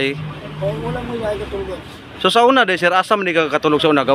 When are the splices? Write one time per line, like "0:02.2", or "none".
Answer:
none